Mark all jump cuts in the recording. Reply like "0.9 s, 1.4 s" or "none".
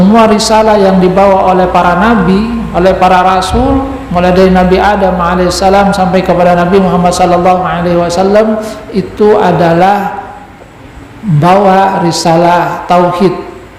none